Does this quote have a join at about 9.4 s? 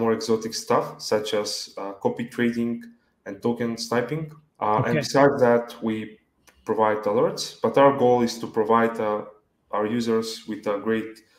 no; 1 cut; at 4.4 s

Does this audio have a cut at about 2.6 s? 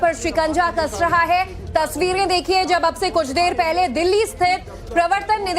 no; 1 cut; at 4.3 s

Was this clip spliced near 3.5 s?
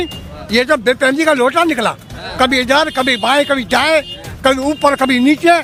no; 0 cuts

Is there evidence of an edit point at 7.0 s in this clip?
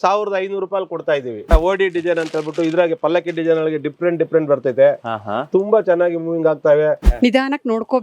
yes; 2 cuts; at 1.5 s, 7.0 s

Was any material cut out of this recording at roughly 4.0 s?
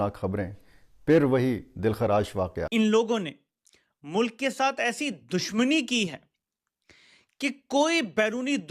no; 1 cut; at 2.6 s

